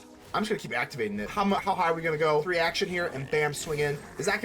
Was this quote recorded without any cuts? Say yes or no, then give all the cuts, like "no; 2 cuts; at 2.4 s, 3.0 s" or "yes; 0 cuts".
no; 2 cuts; at 1.3 s, 2.5 s